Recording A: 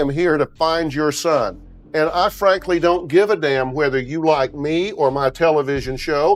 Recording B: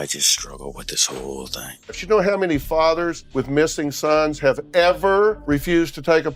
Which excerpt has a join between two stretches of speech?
B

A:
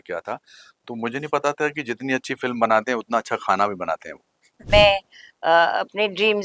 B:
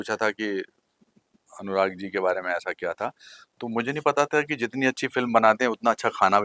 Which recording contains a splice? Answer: A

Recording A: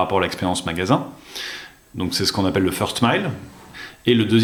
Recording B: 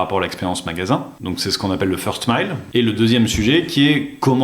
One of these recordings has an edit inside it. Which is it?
B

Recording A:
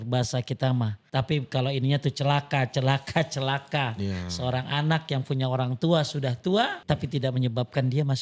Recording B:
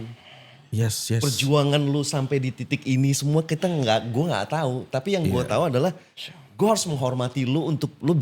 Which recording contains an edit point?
A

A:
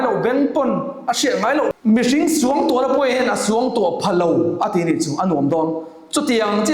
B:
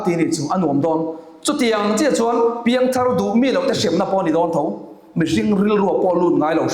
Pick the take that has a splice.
A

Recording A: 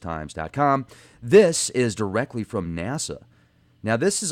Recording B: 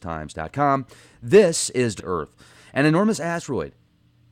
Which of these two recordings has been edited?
A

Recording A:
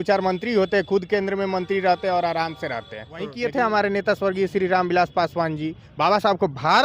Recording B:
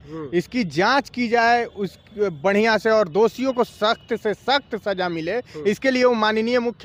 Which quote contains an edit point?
A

